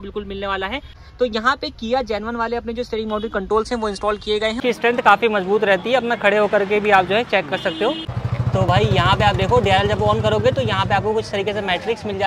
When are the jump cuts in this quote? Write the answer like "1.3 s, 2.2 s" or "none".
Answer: 1.0 s, 4.6 s, 8.1 s

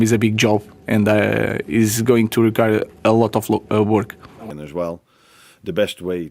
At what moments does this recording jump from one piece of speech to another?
4.4 s

